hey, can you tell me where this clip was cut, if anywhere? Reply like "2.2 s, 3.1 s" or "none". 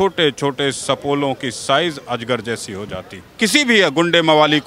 3.4 s